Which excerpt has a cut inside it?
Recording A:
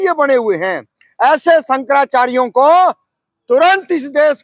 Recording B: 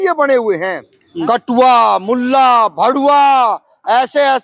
B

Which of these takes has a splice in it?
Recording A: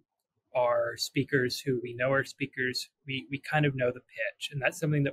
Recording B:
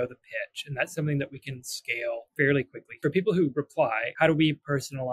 B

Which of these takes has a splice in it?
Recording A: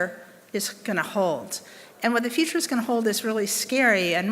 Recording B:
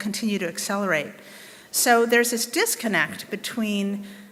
A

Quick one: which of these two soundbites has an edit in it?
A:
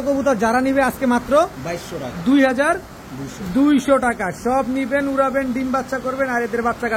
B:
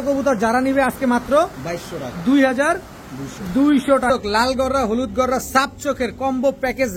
B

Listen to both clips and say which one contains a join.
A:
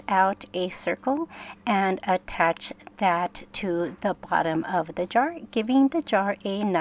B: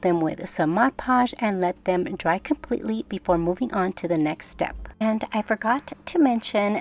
B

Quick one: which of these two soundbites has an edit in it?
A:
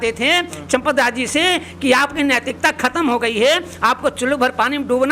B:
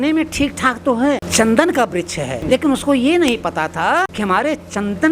B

